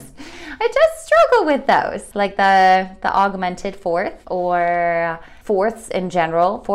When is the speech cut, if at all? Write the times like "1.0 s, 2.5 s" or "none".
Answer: 2.0 s, 4.2 s, 5.3 s